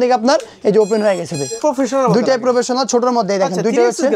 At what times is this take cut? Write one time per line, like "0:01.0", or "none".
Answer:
0:01.5